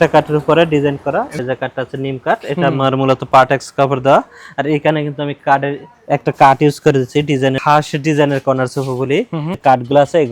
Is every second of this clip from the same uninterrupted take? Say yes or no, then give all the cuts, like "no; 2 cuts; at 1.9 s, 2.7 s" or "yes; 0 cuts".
no; 3 cuts; at 1.4 s, 7.6 s, 9.6 s